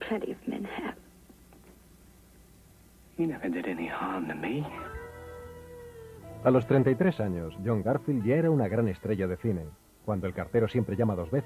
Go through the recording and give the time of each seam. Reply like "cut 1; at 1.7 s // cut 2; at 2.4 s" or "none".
cut 1; at 6.8 s